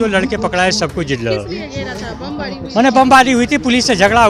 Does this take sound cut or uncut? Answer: uncut